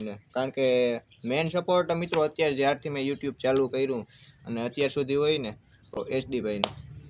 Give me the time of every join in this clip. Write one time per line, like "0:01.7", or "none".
none

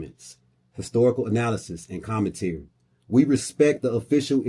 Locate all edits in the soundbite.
none

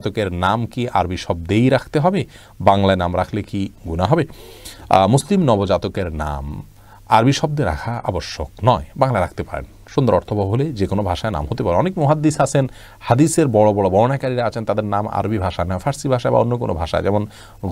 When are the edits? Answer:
none

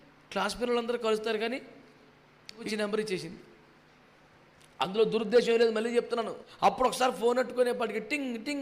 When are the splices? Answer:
0:02.7
0:06.4

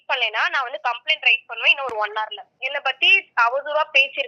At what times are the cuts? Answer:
0:02.5

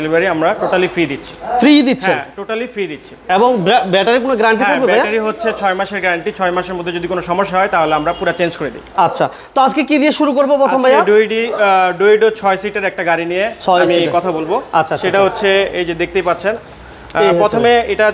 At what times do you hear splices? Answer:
none

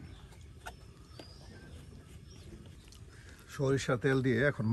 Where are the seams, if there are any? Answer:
0:02.8

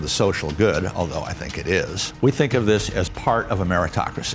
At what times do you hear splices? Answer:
0:02.0
0:03.1

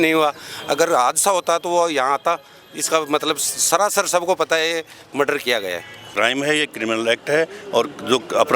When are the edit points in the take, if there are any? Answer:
0:06.1

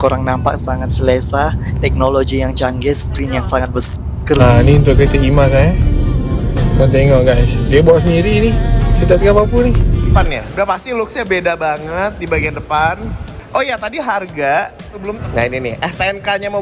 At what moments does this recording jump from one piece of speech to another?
0:04.4
0:10.1
0:15.2

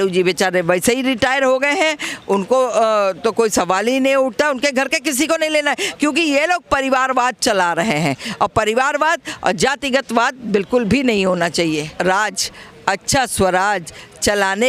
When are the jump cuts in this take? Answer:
0:11.9

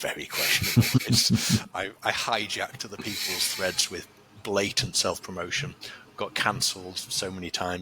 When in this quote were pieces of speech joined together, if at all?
0:01.0

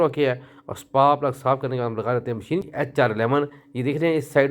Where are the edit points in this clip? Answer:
0:02.6

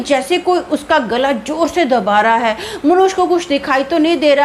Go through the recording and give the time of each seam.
none

